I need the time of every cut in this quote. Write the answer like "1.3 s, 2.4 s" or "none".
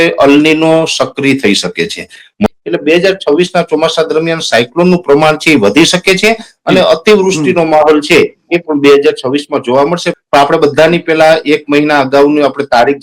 2.5 s, 10.1 s

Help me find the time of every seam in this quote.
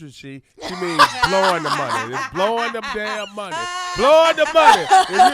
none

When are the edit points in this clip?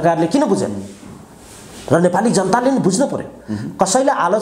none

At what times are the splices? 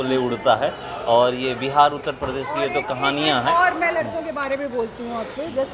none

